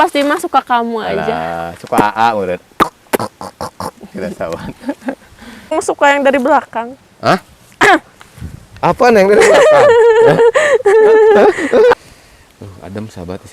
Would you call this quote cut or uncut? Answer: cut